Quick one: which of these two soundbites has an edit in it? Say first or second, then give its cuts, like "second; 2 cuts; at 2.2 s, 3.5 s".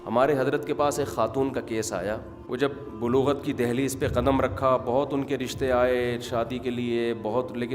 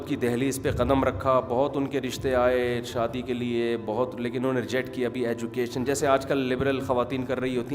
first; 1 cut; at 2.3 s